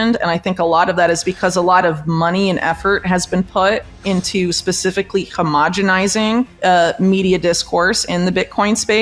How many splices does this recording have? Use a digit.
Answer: 1